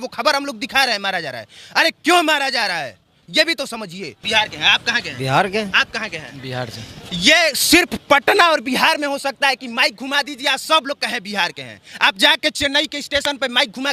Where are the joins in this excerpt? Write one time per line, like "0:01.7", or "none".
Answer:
0:04.1

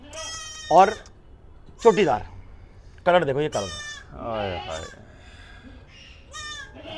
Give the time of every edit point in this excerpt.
none

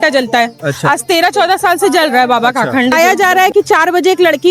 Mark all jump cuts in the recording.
0:02.9

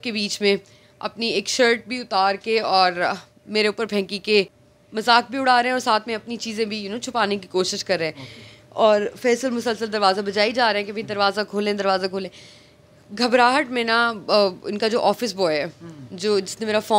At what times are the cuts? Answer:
none

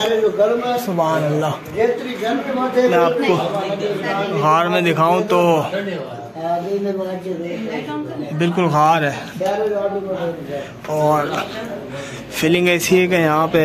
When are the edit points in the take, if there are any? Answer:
none

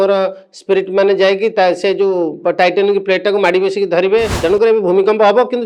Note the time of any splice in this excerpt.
0:04.4

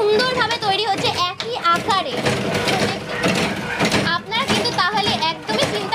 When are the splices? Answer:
0:02.2

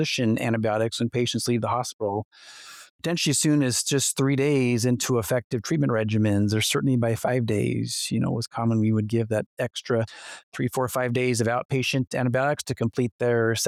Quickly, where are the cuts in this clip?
none

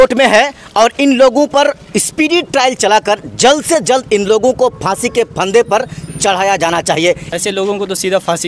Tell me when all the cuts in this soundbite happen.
0:07.3

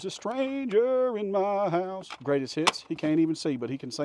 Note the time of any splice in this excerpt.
none

